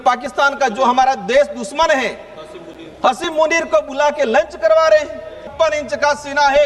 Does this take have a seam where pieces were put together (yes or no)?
yes